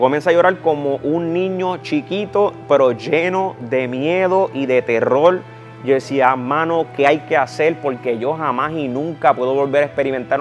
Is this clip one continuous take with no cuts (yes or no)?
yes